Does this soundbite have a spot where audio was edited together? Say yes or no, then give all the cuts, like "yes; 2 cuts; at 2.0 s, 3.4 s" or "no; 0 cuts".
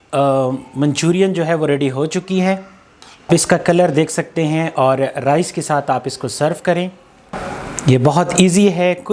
no; 0 cuts